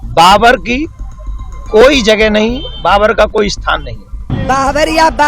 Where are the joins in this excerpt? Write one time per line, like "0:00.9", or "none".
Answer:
0:04.2